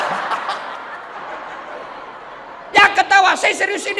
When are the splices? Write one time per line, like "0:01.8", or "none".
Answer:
0:01.1